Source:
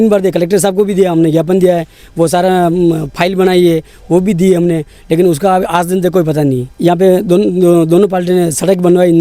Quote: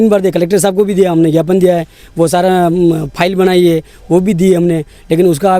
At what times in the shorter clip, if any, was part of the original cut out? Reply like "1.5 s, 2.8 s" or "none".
none